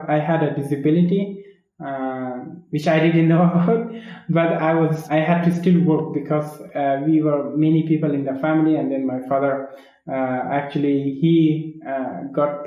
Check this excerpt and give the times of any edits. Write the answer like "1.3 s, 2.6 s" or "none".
5.0 s